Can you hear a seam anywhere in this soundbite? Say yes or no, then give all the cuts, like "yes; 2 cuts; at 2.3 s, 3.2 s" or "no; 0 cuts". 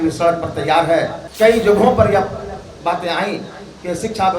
yes; 1 cut; at 1.2 s